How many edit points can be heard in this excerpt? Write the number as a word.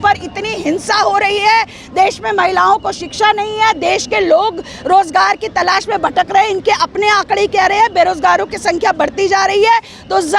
zero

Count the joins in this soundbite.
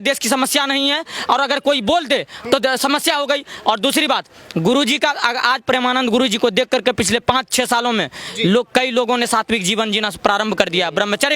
zero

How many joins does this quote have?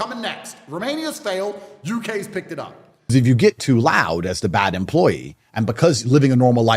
one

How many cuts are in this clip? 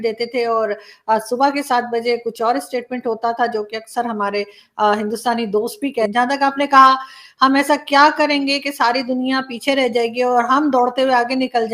one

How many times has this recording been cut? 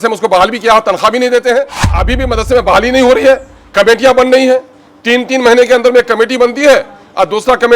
one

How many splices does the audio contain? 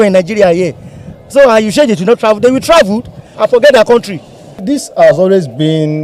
two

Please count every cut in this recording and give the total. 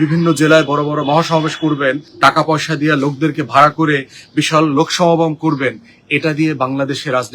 one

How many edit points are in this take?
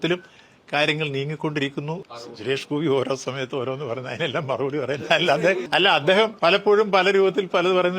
two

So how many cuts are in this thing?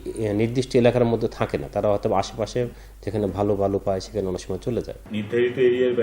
one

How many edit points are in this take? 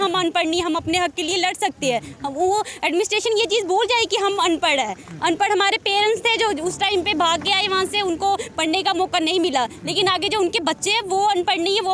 zero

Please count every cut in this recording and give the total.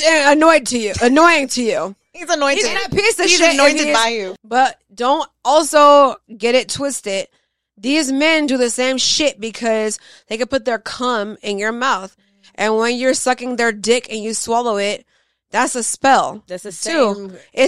one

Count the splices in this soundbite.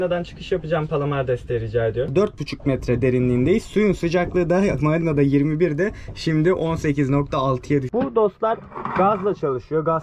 two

